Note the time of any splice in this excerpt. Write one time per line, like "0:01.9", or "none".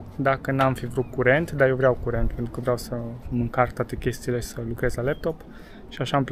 none